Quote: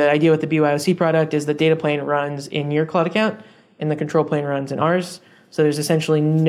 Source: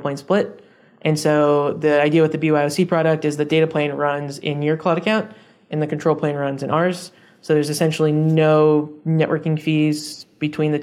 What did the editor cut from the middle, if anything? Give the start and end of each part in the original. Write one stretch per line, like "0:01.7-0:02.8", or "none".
none